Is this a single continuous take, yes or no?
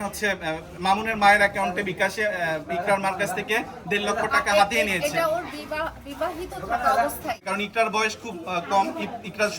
no